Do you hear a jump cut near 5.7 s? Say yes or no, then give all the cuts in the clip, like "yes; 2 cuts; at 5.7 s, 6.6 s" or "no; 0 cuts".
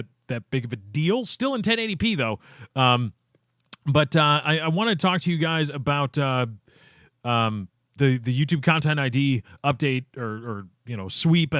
yes; 1 cut; at 5.7 s